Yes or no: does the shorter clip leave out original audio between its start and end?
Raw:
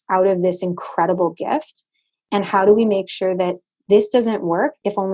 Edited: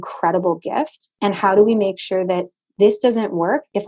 yes